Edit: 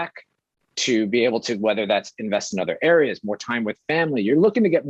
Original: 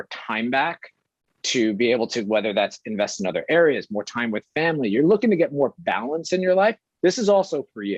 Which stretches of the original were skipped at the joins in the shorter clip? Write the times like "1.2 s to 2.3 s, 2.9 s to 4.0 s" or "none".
none

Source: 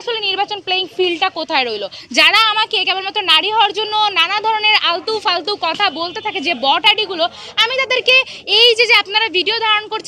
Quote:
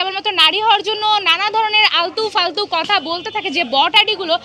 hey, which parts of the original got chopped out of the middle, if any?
none

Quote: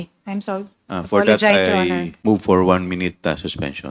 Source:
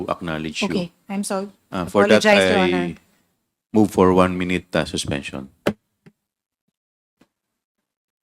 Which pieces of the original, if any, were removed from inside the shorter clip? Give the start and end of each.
2.9 s to 3.6 s

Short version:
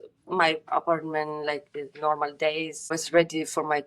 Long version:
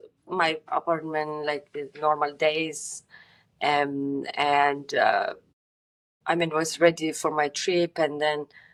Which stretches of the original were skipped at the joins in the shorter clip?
2.9 s to 6.6 s

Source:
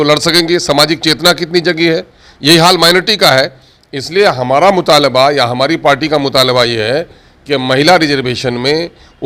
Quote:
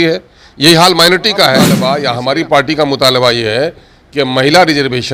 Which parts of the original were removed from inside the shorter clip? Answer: 3.6 s to 5.1 s

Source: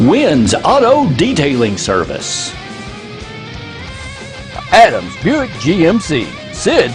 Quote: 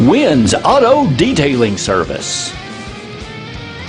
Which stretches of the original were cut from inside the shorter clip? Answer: none

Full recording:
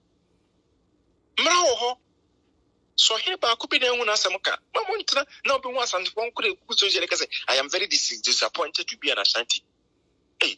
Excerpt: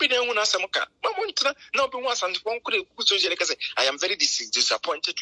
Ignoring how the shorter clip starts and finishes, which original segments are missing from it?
none

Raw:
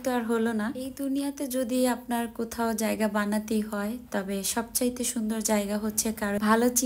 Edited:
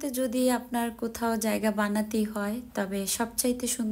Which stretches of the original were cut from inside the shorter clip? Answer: none

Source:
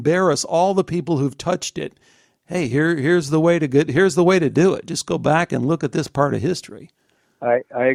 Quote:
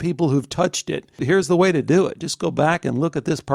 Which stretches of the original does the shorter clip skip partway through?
2.1 s to 3.9 s

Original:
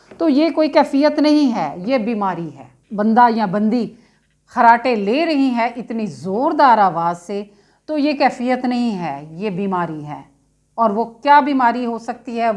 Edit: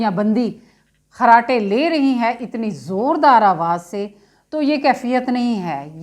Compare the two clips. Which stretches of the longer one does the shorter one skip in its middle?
none

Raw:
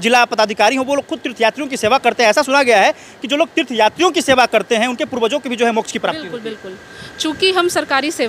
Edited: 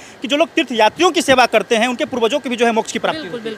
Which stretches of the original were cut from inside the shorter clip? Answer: none

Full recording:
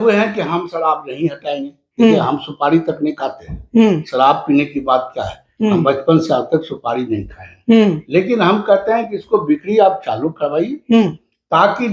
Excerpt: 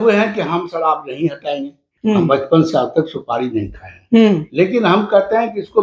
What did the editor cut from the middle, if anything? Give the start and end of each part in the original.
1.8 s to 5.3 s

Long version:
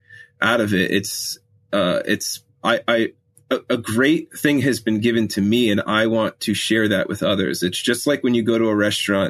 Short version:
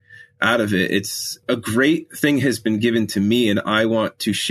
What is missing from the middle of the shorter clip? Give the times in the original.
1.4 s to 3.6 s

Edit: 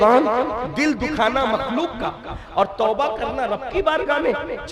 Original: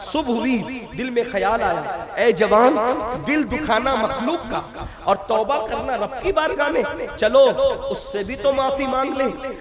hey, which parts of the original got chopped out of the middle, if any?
none

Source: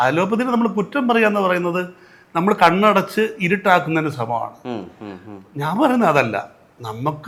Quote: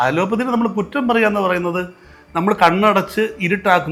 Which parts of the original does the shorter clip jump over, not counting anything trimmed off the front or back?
none

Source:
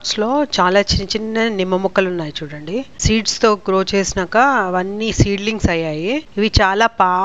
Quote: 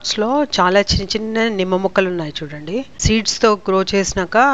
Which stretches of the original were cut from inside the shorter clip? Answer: none

